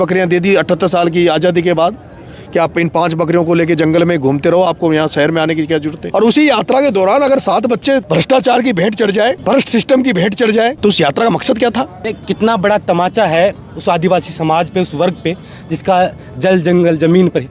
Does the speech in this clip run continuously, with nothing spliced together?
no; 5 cuts; at 6.0 s, 8.1 s, 9.4 s, 10.8 s, 12.0 s

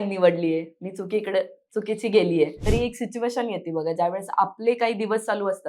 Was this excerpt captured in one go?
no; 1 cut; at 2.6 s

